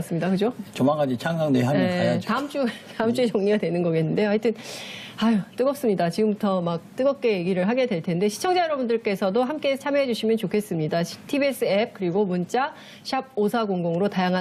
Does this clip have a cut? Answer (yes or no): no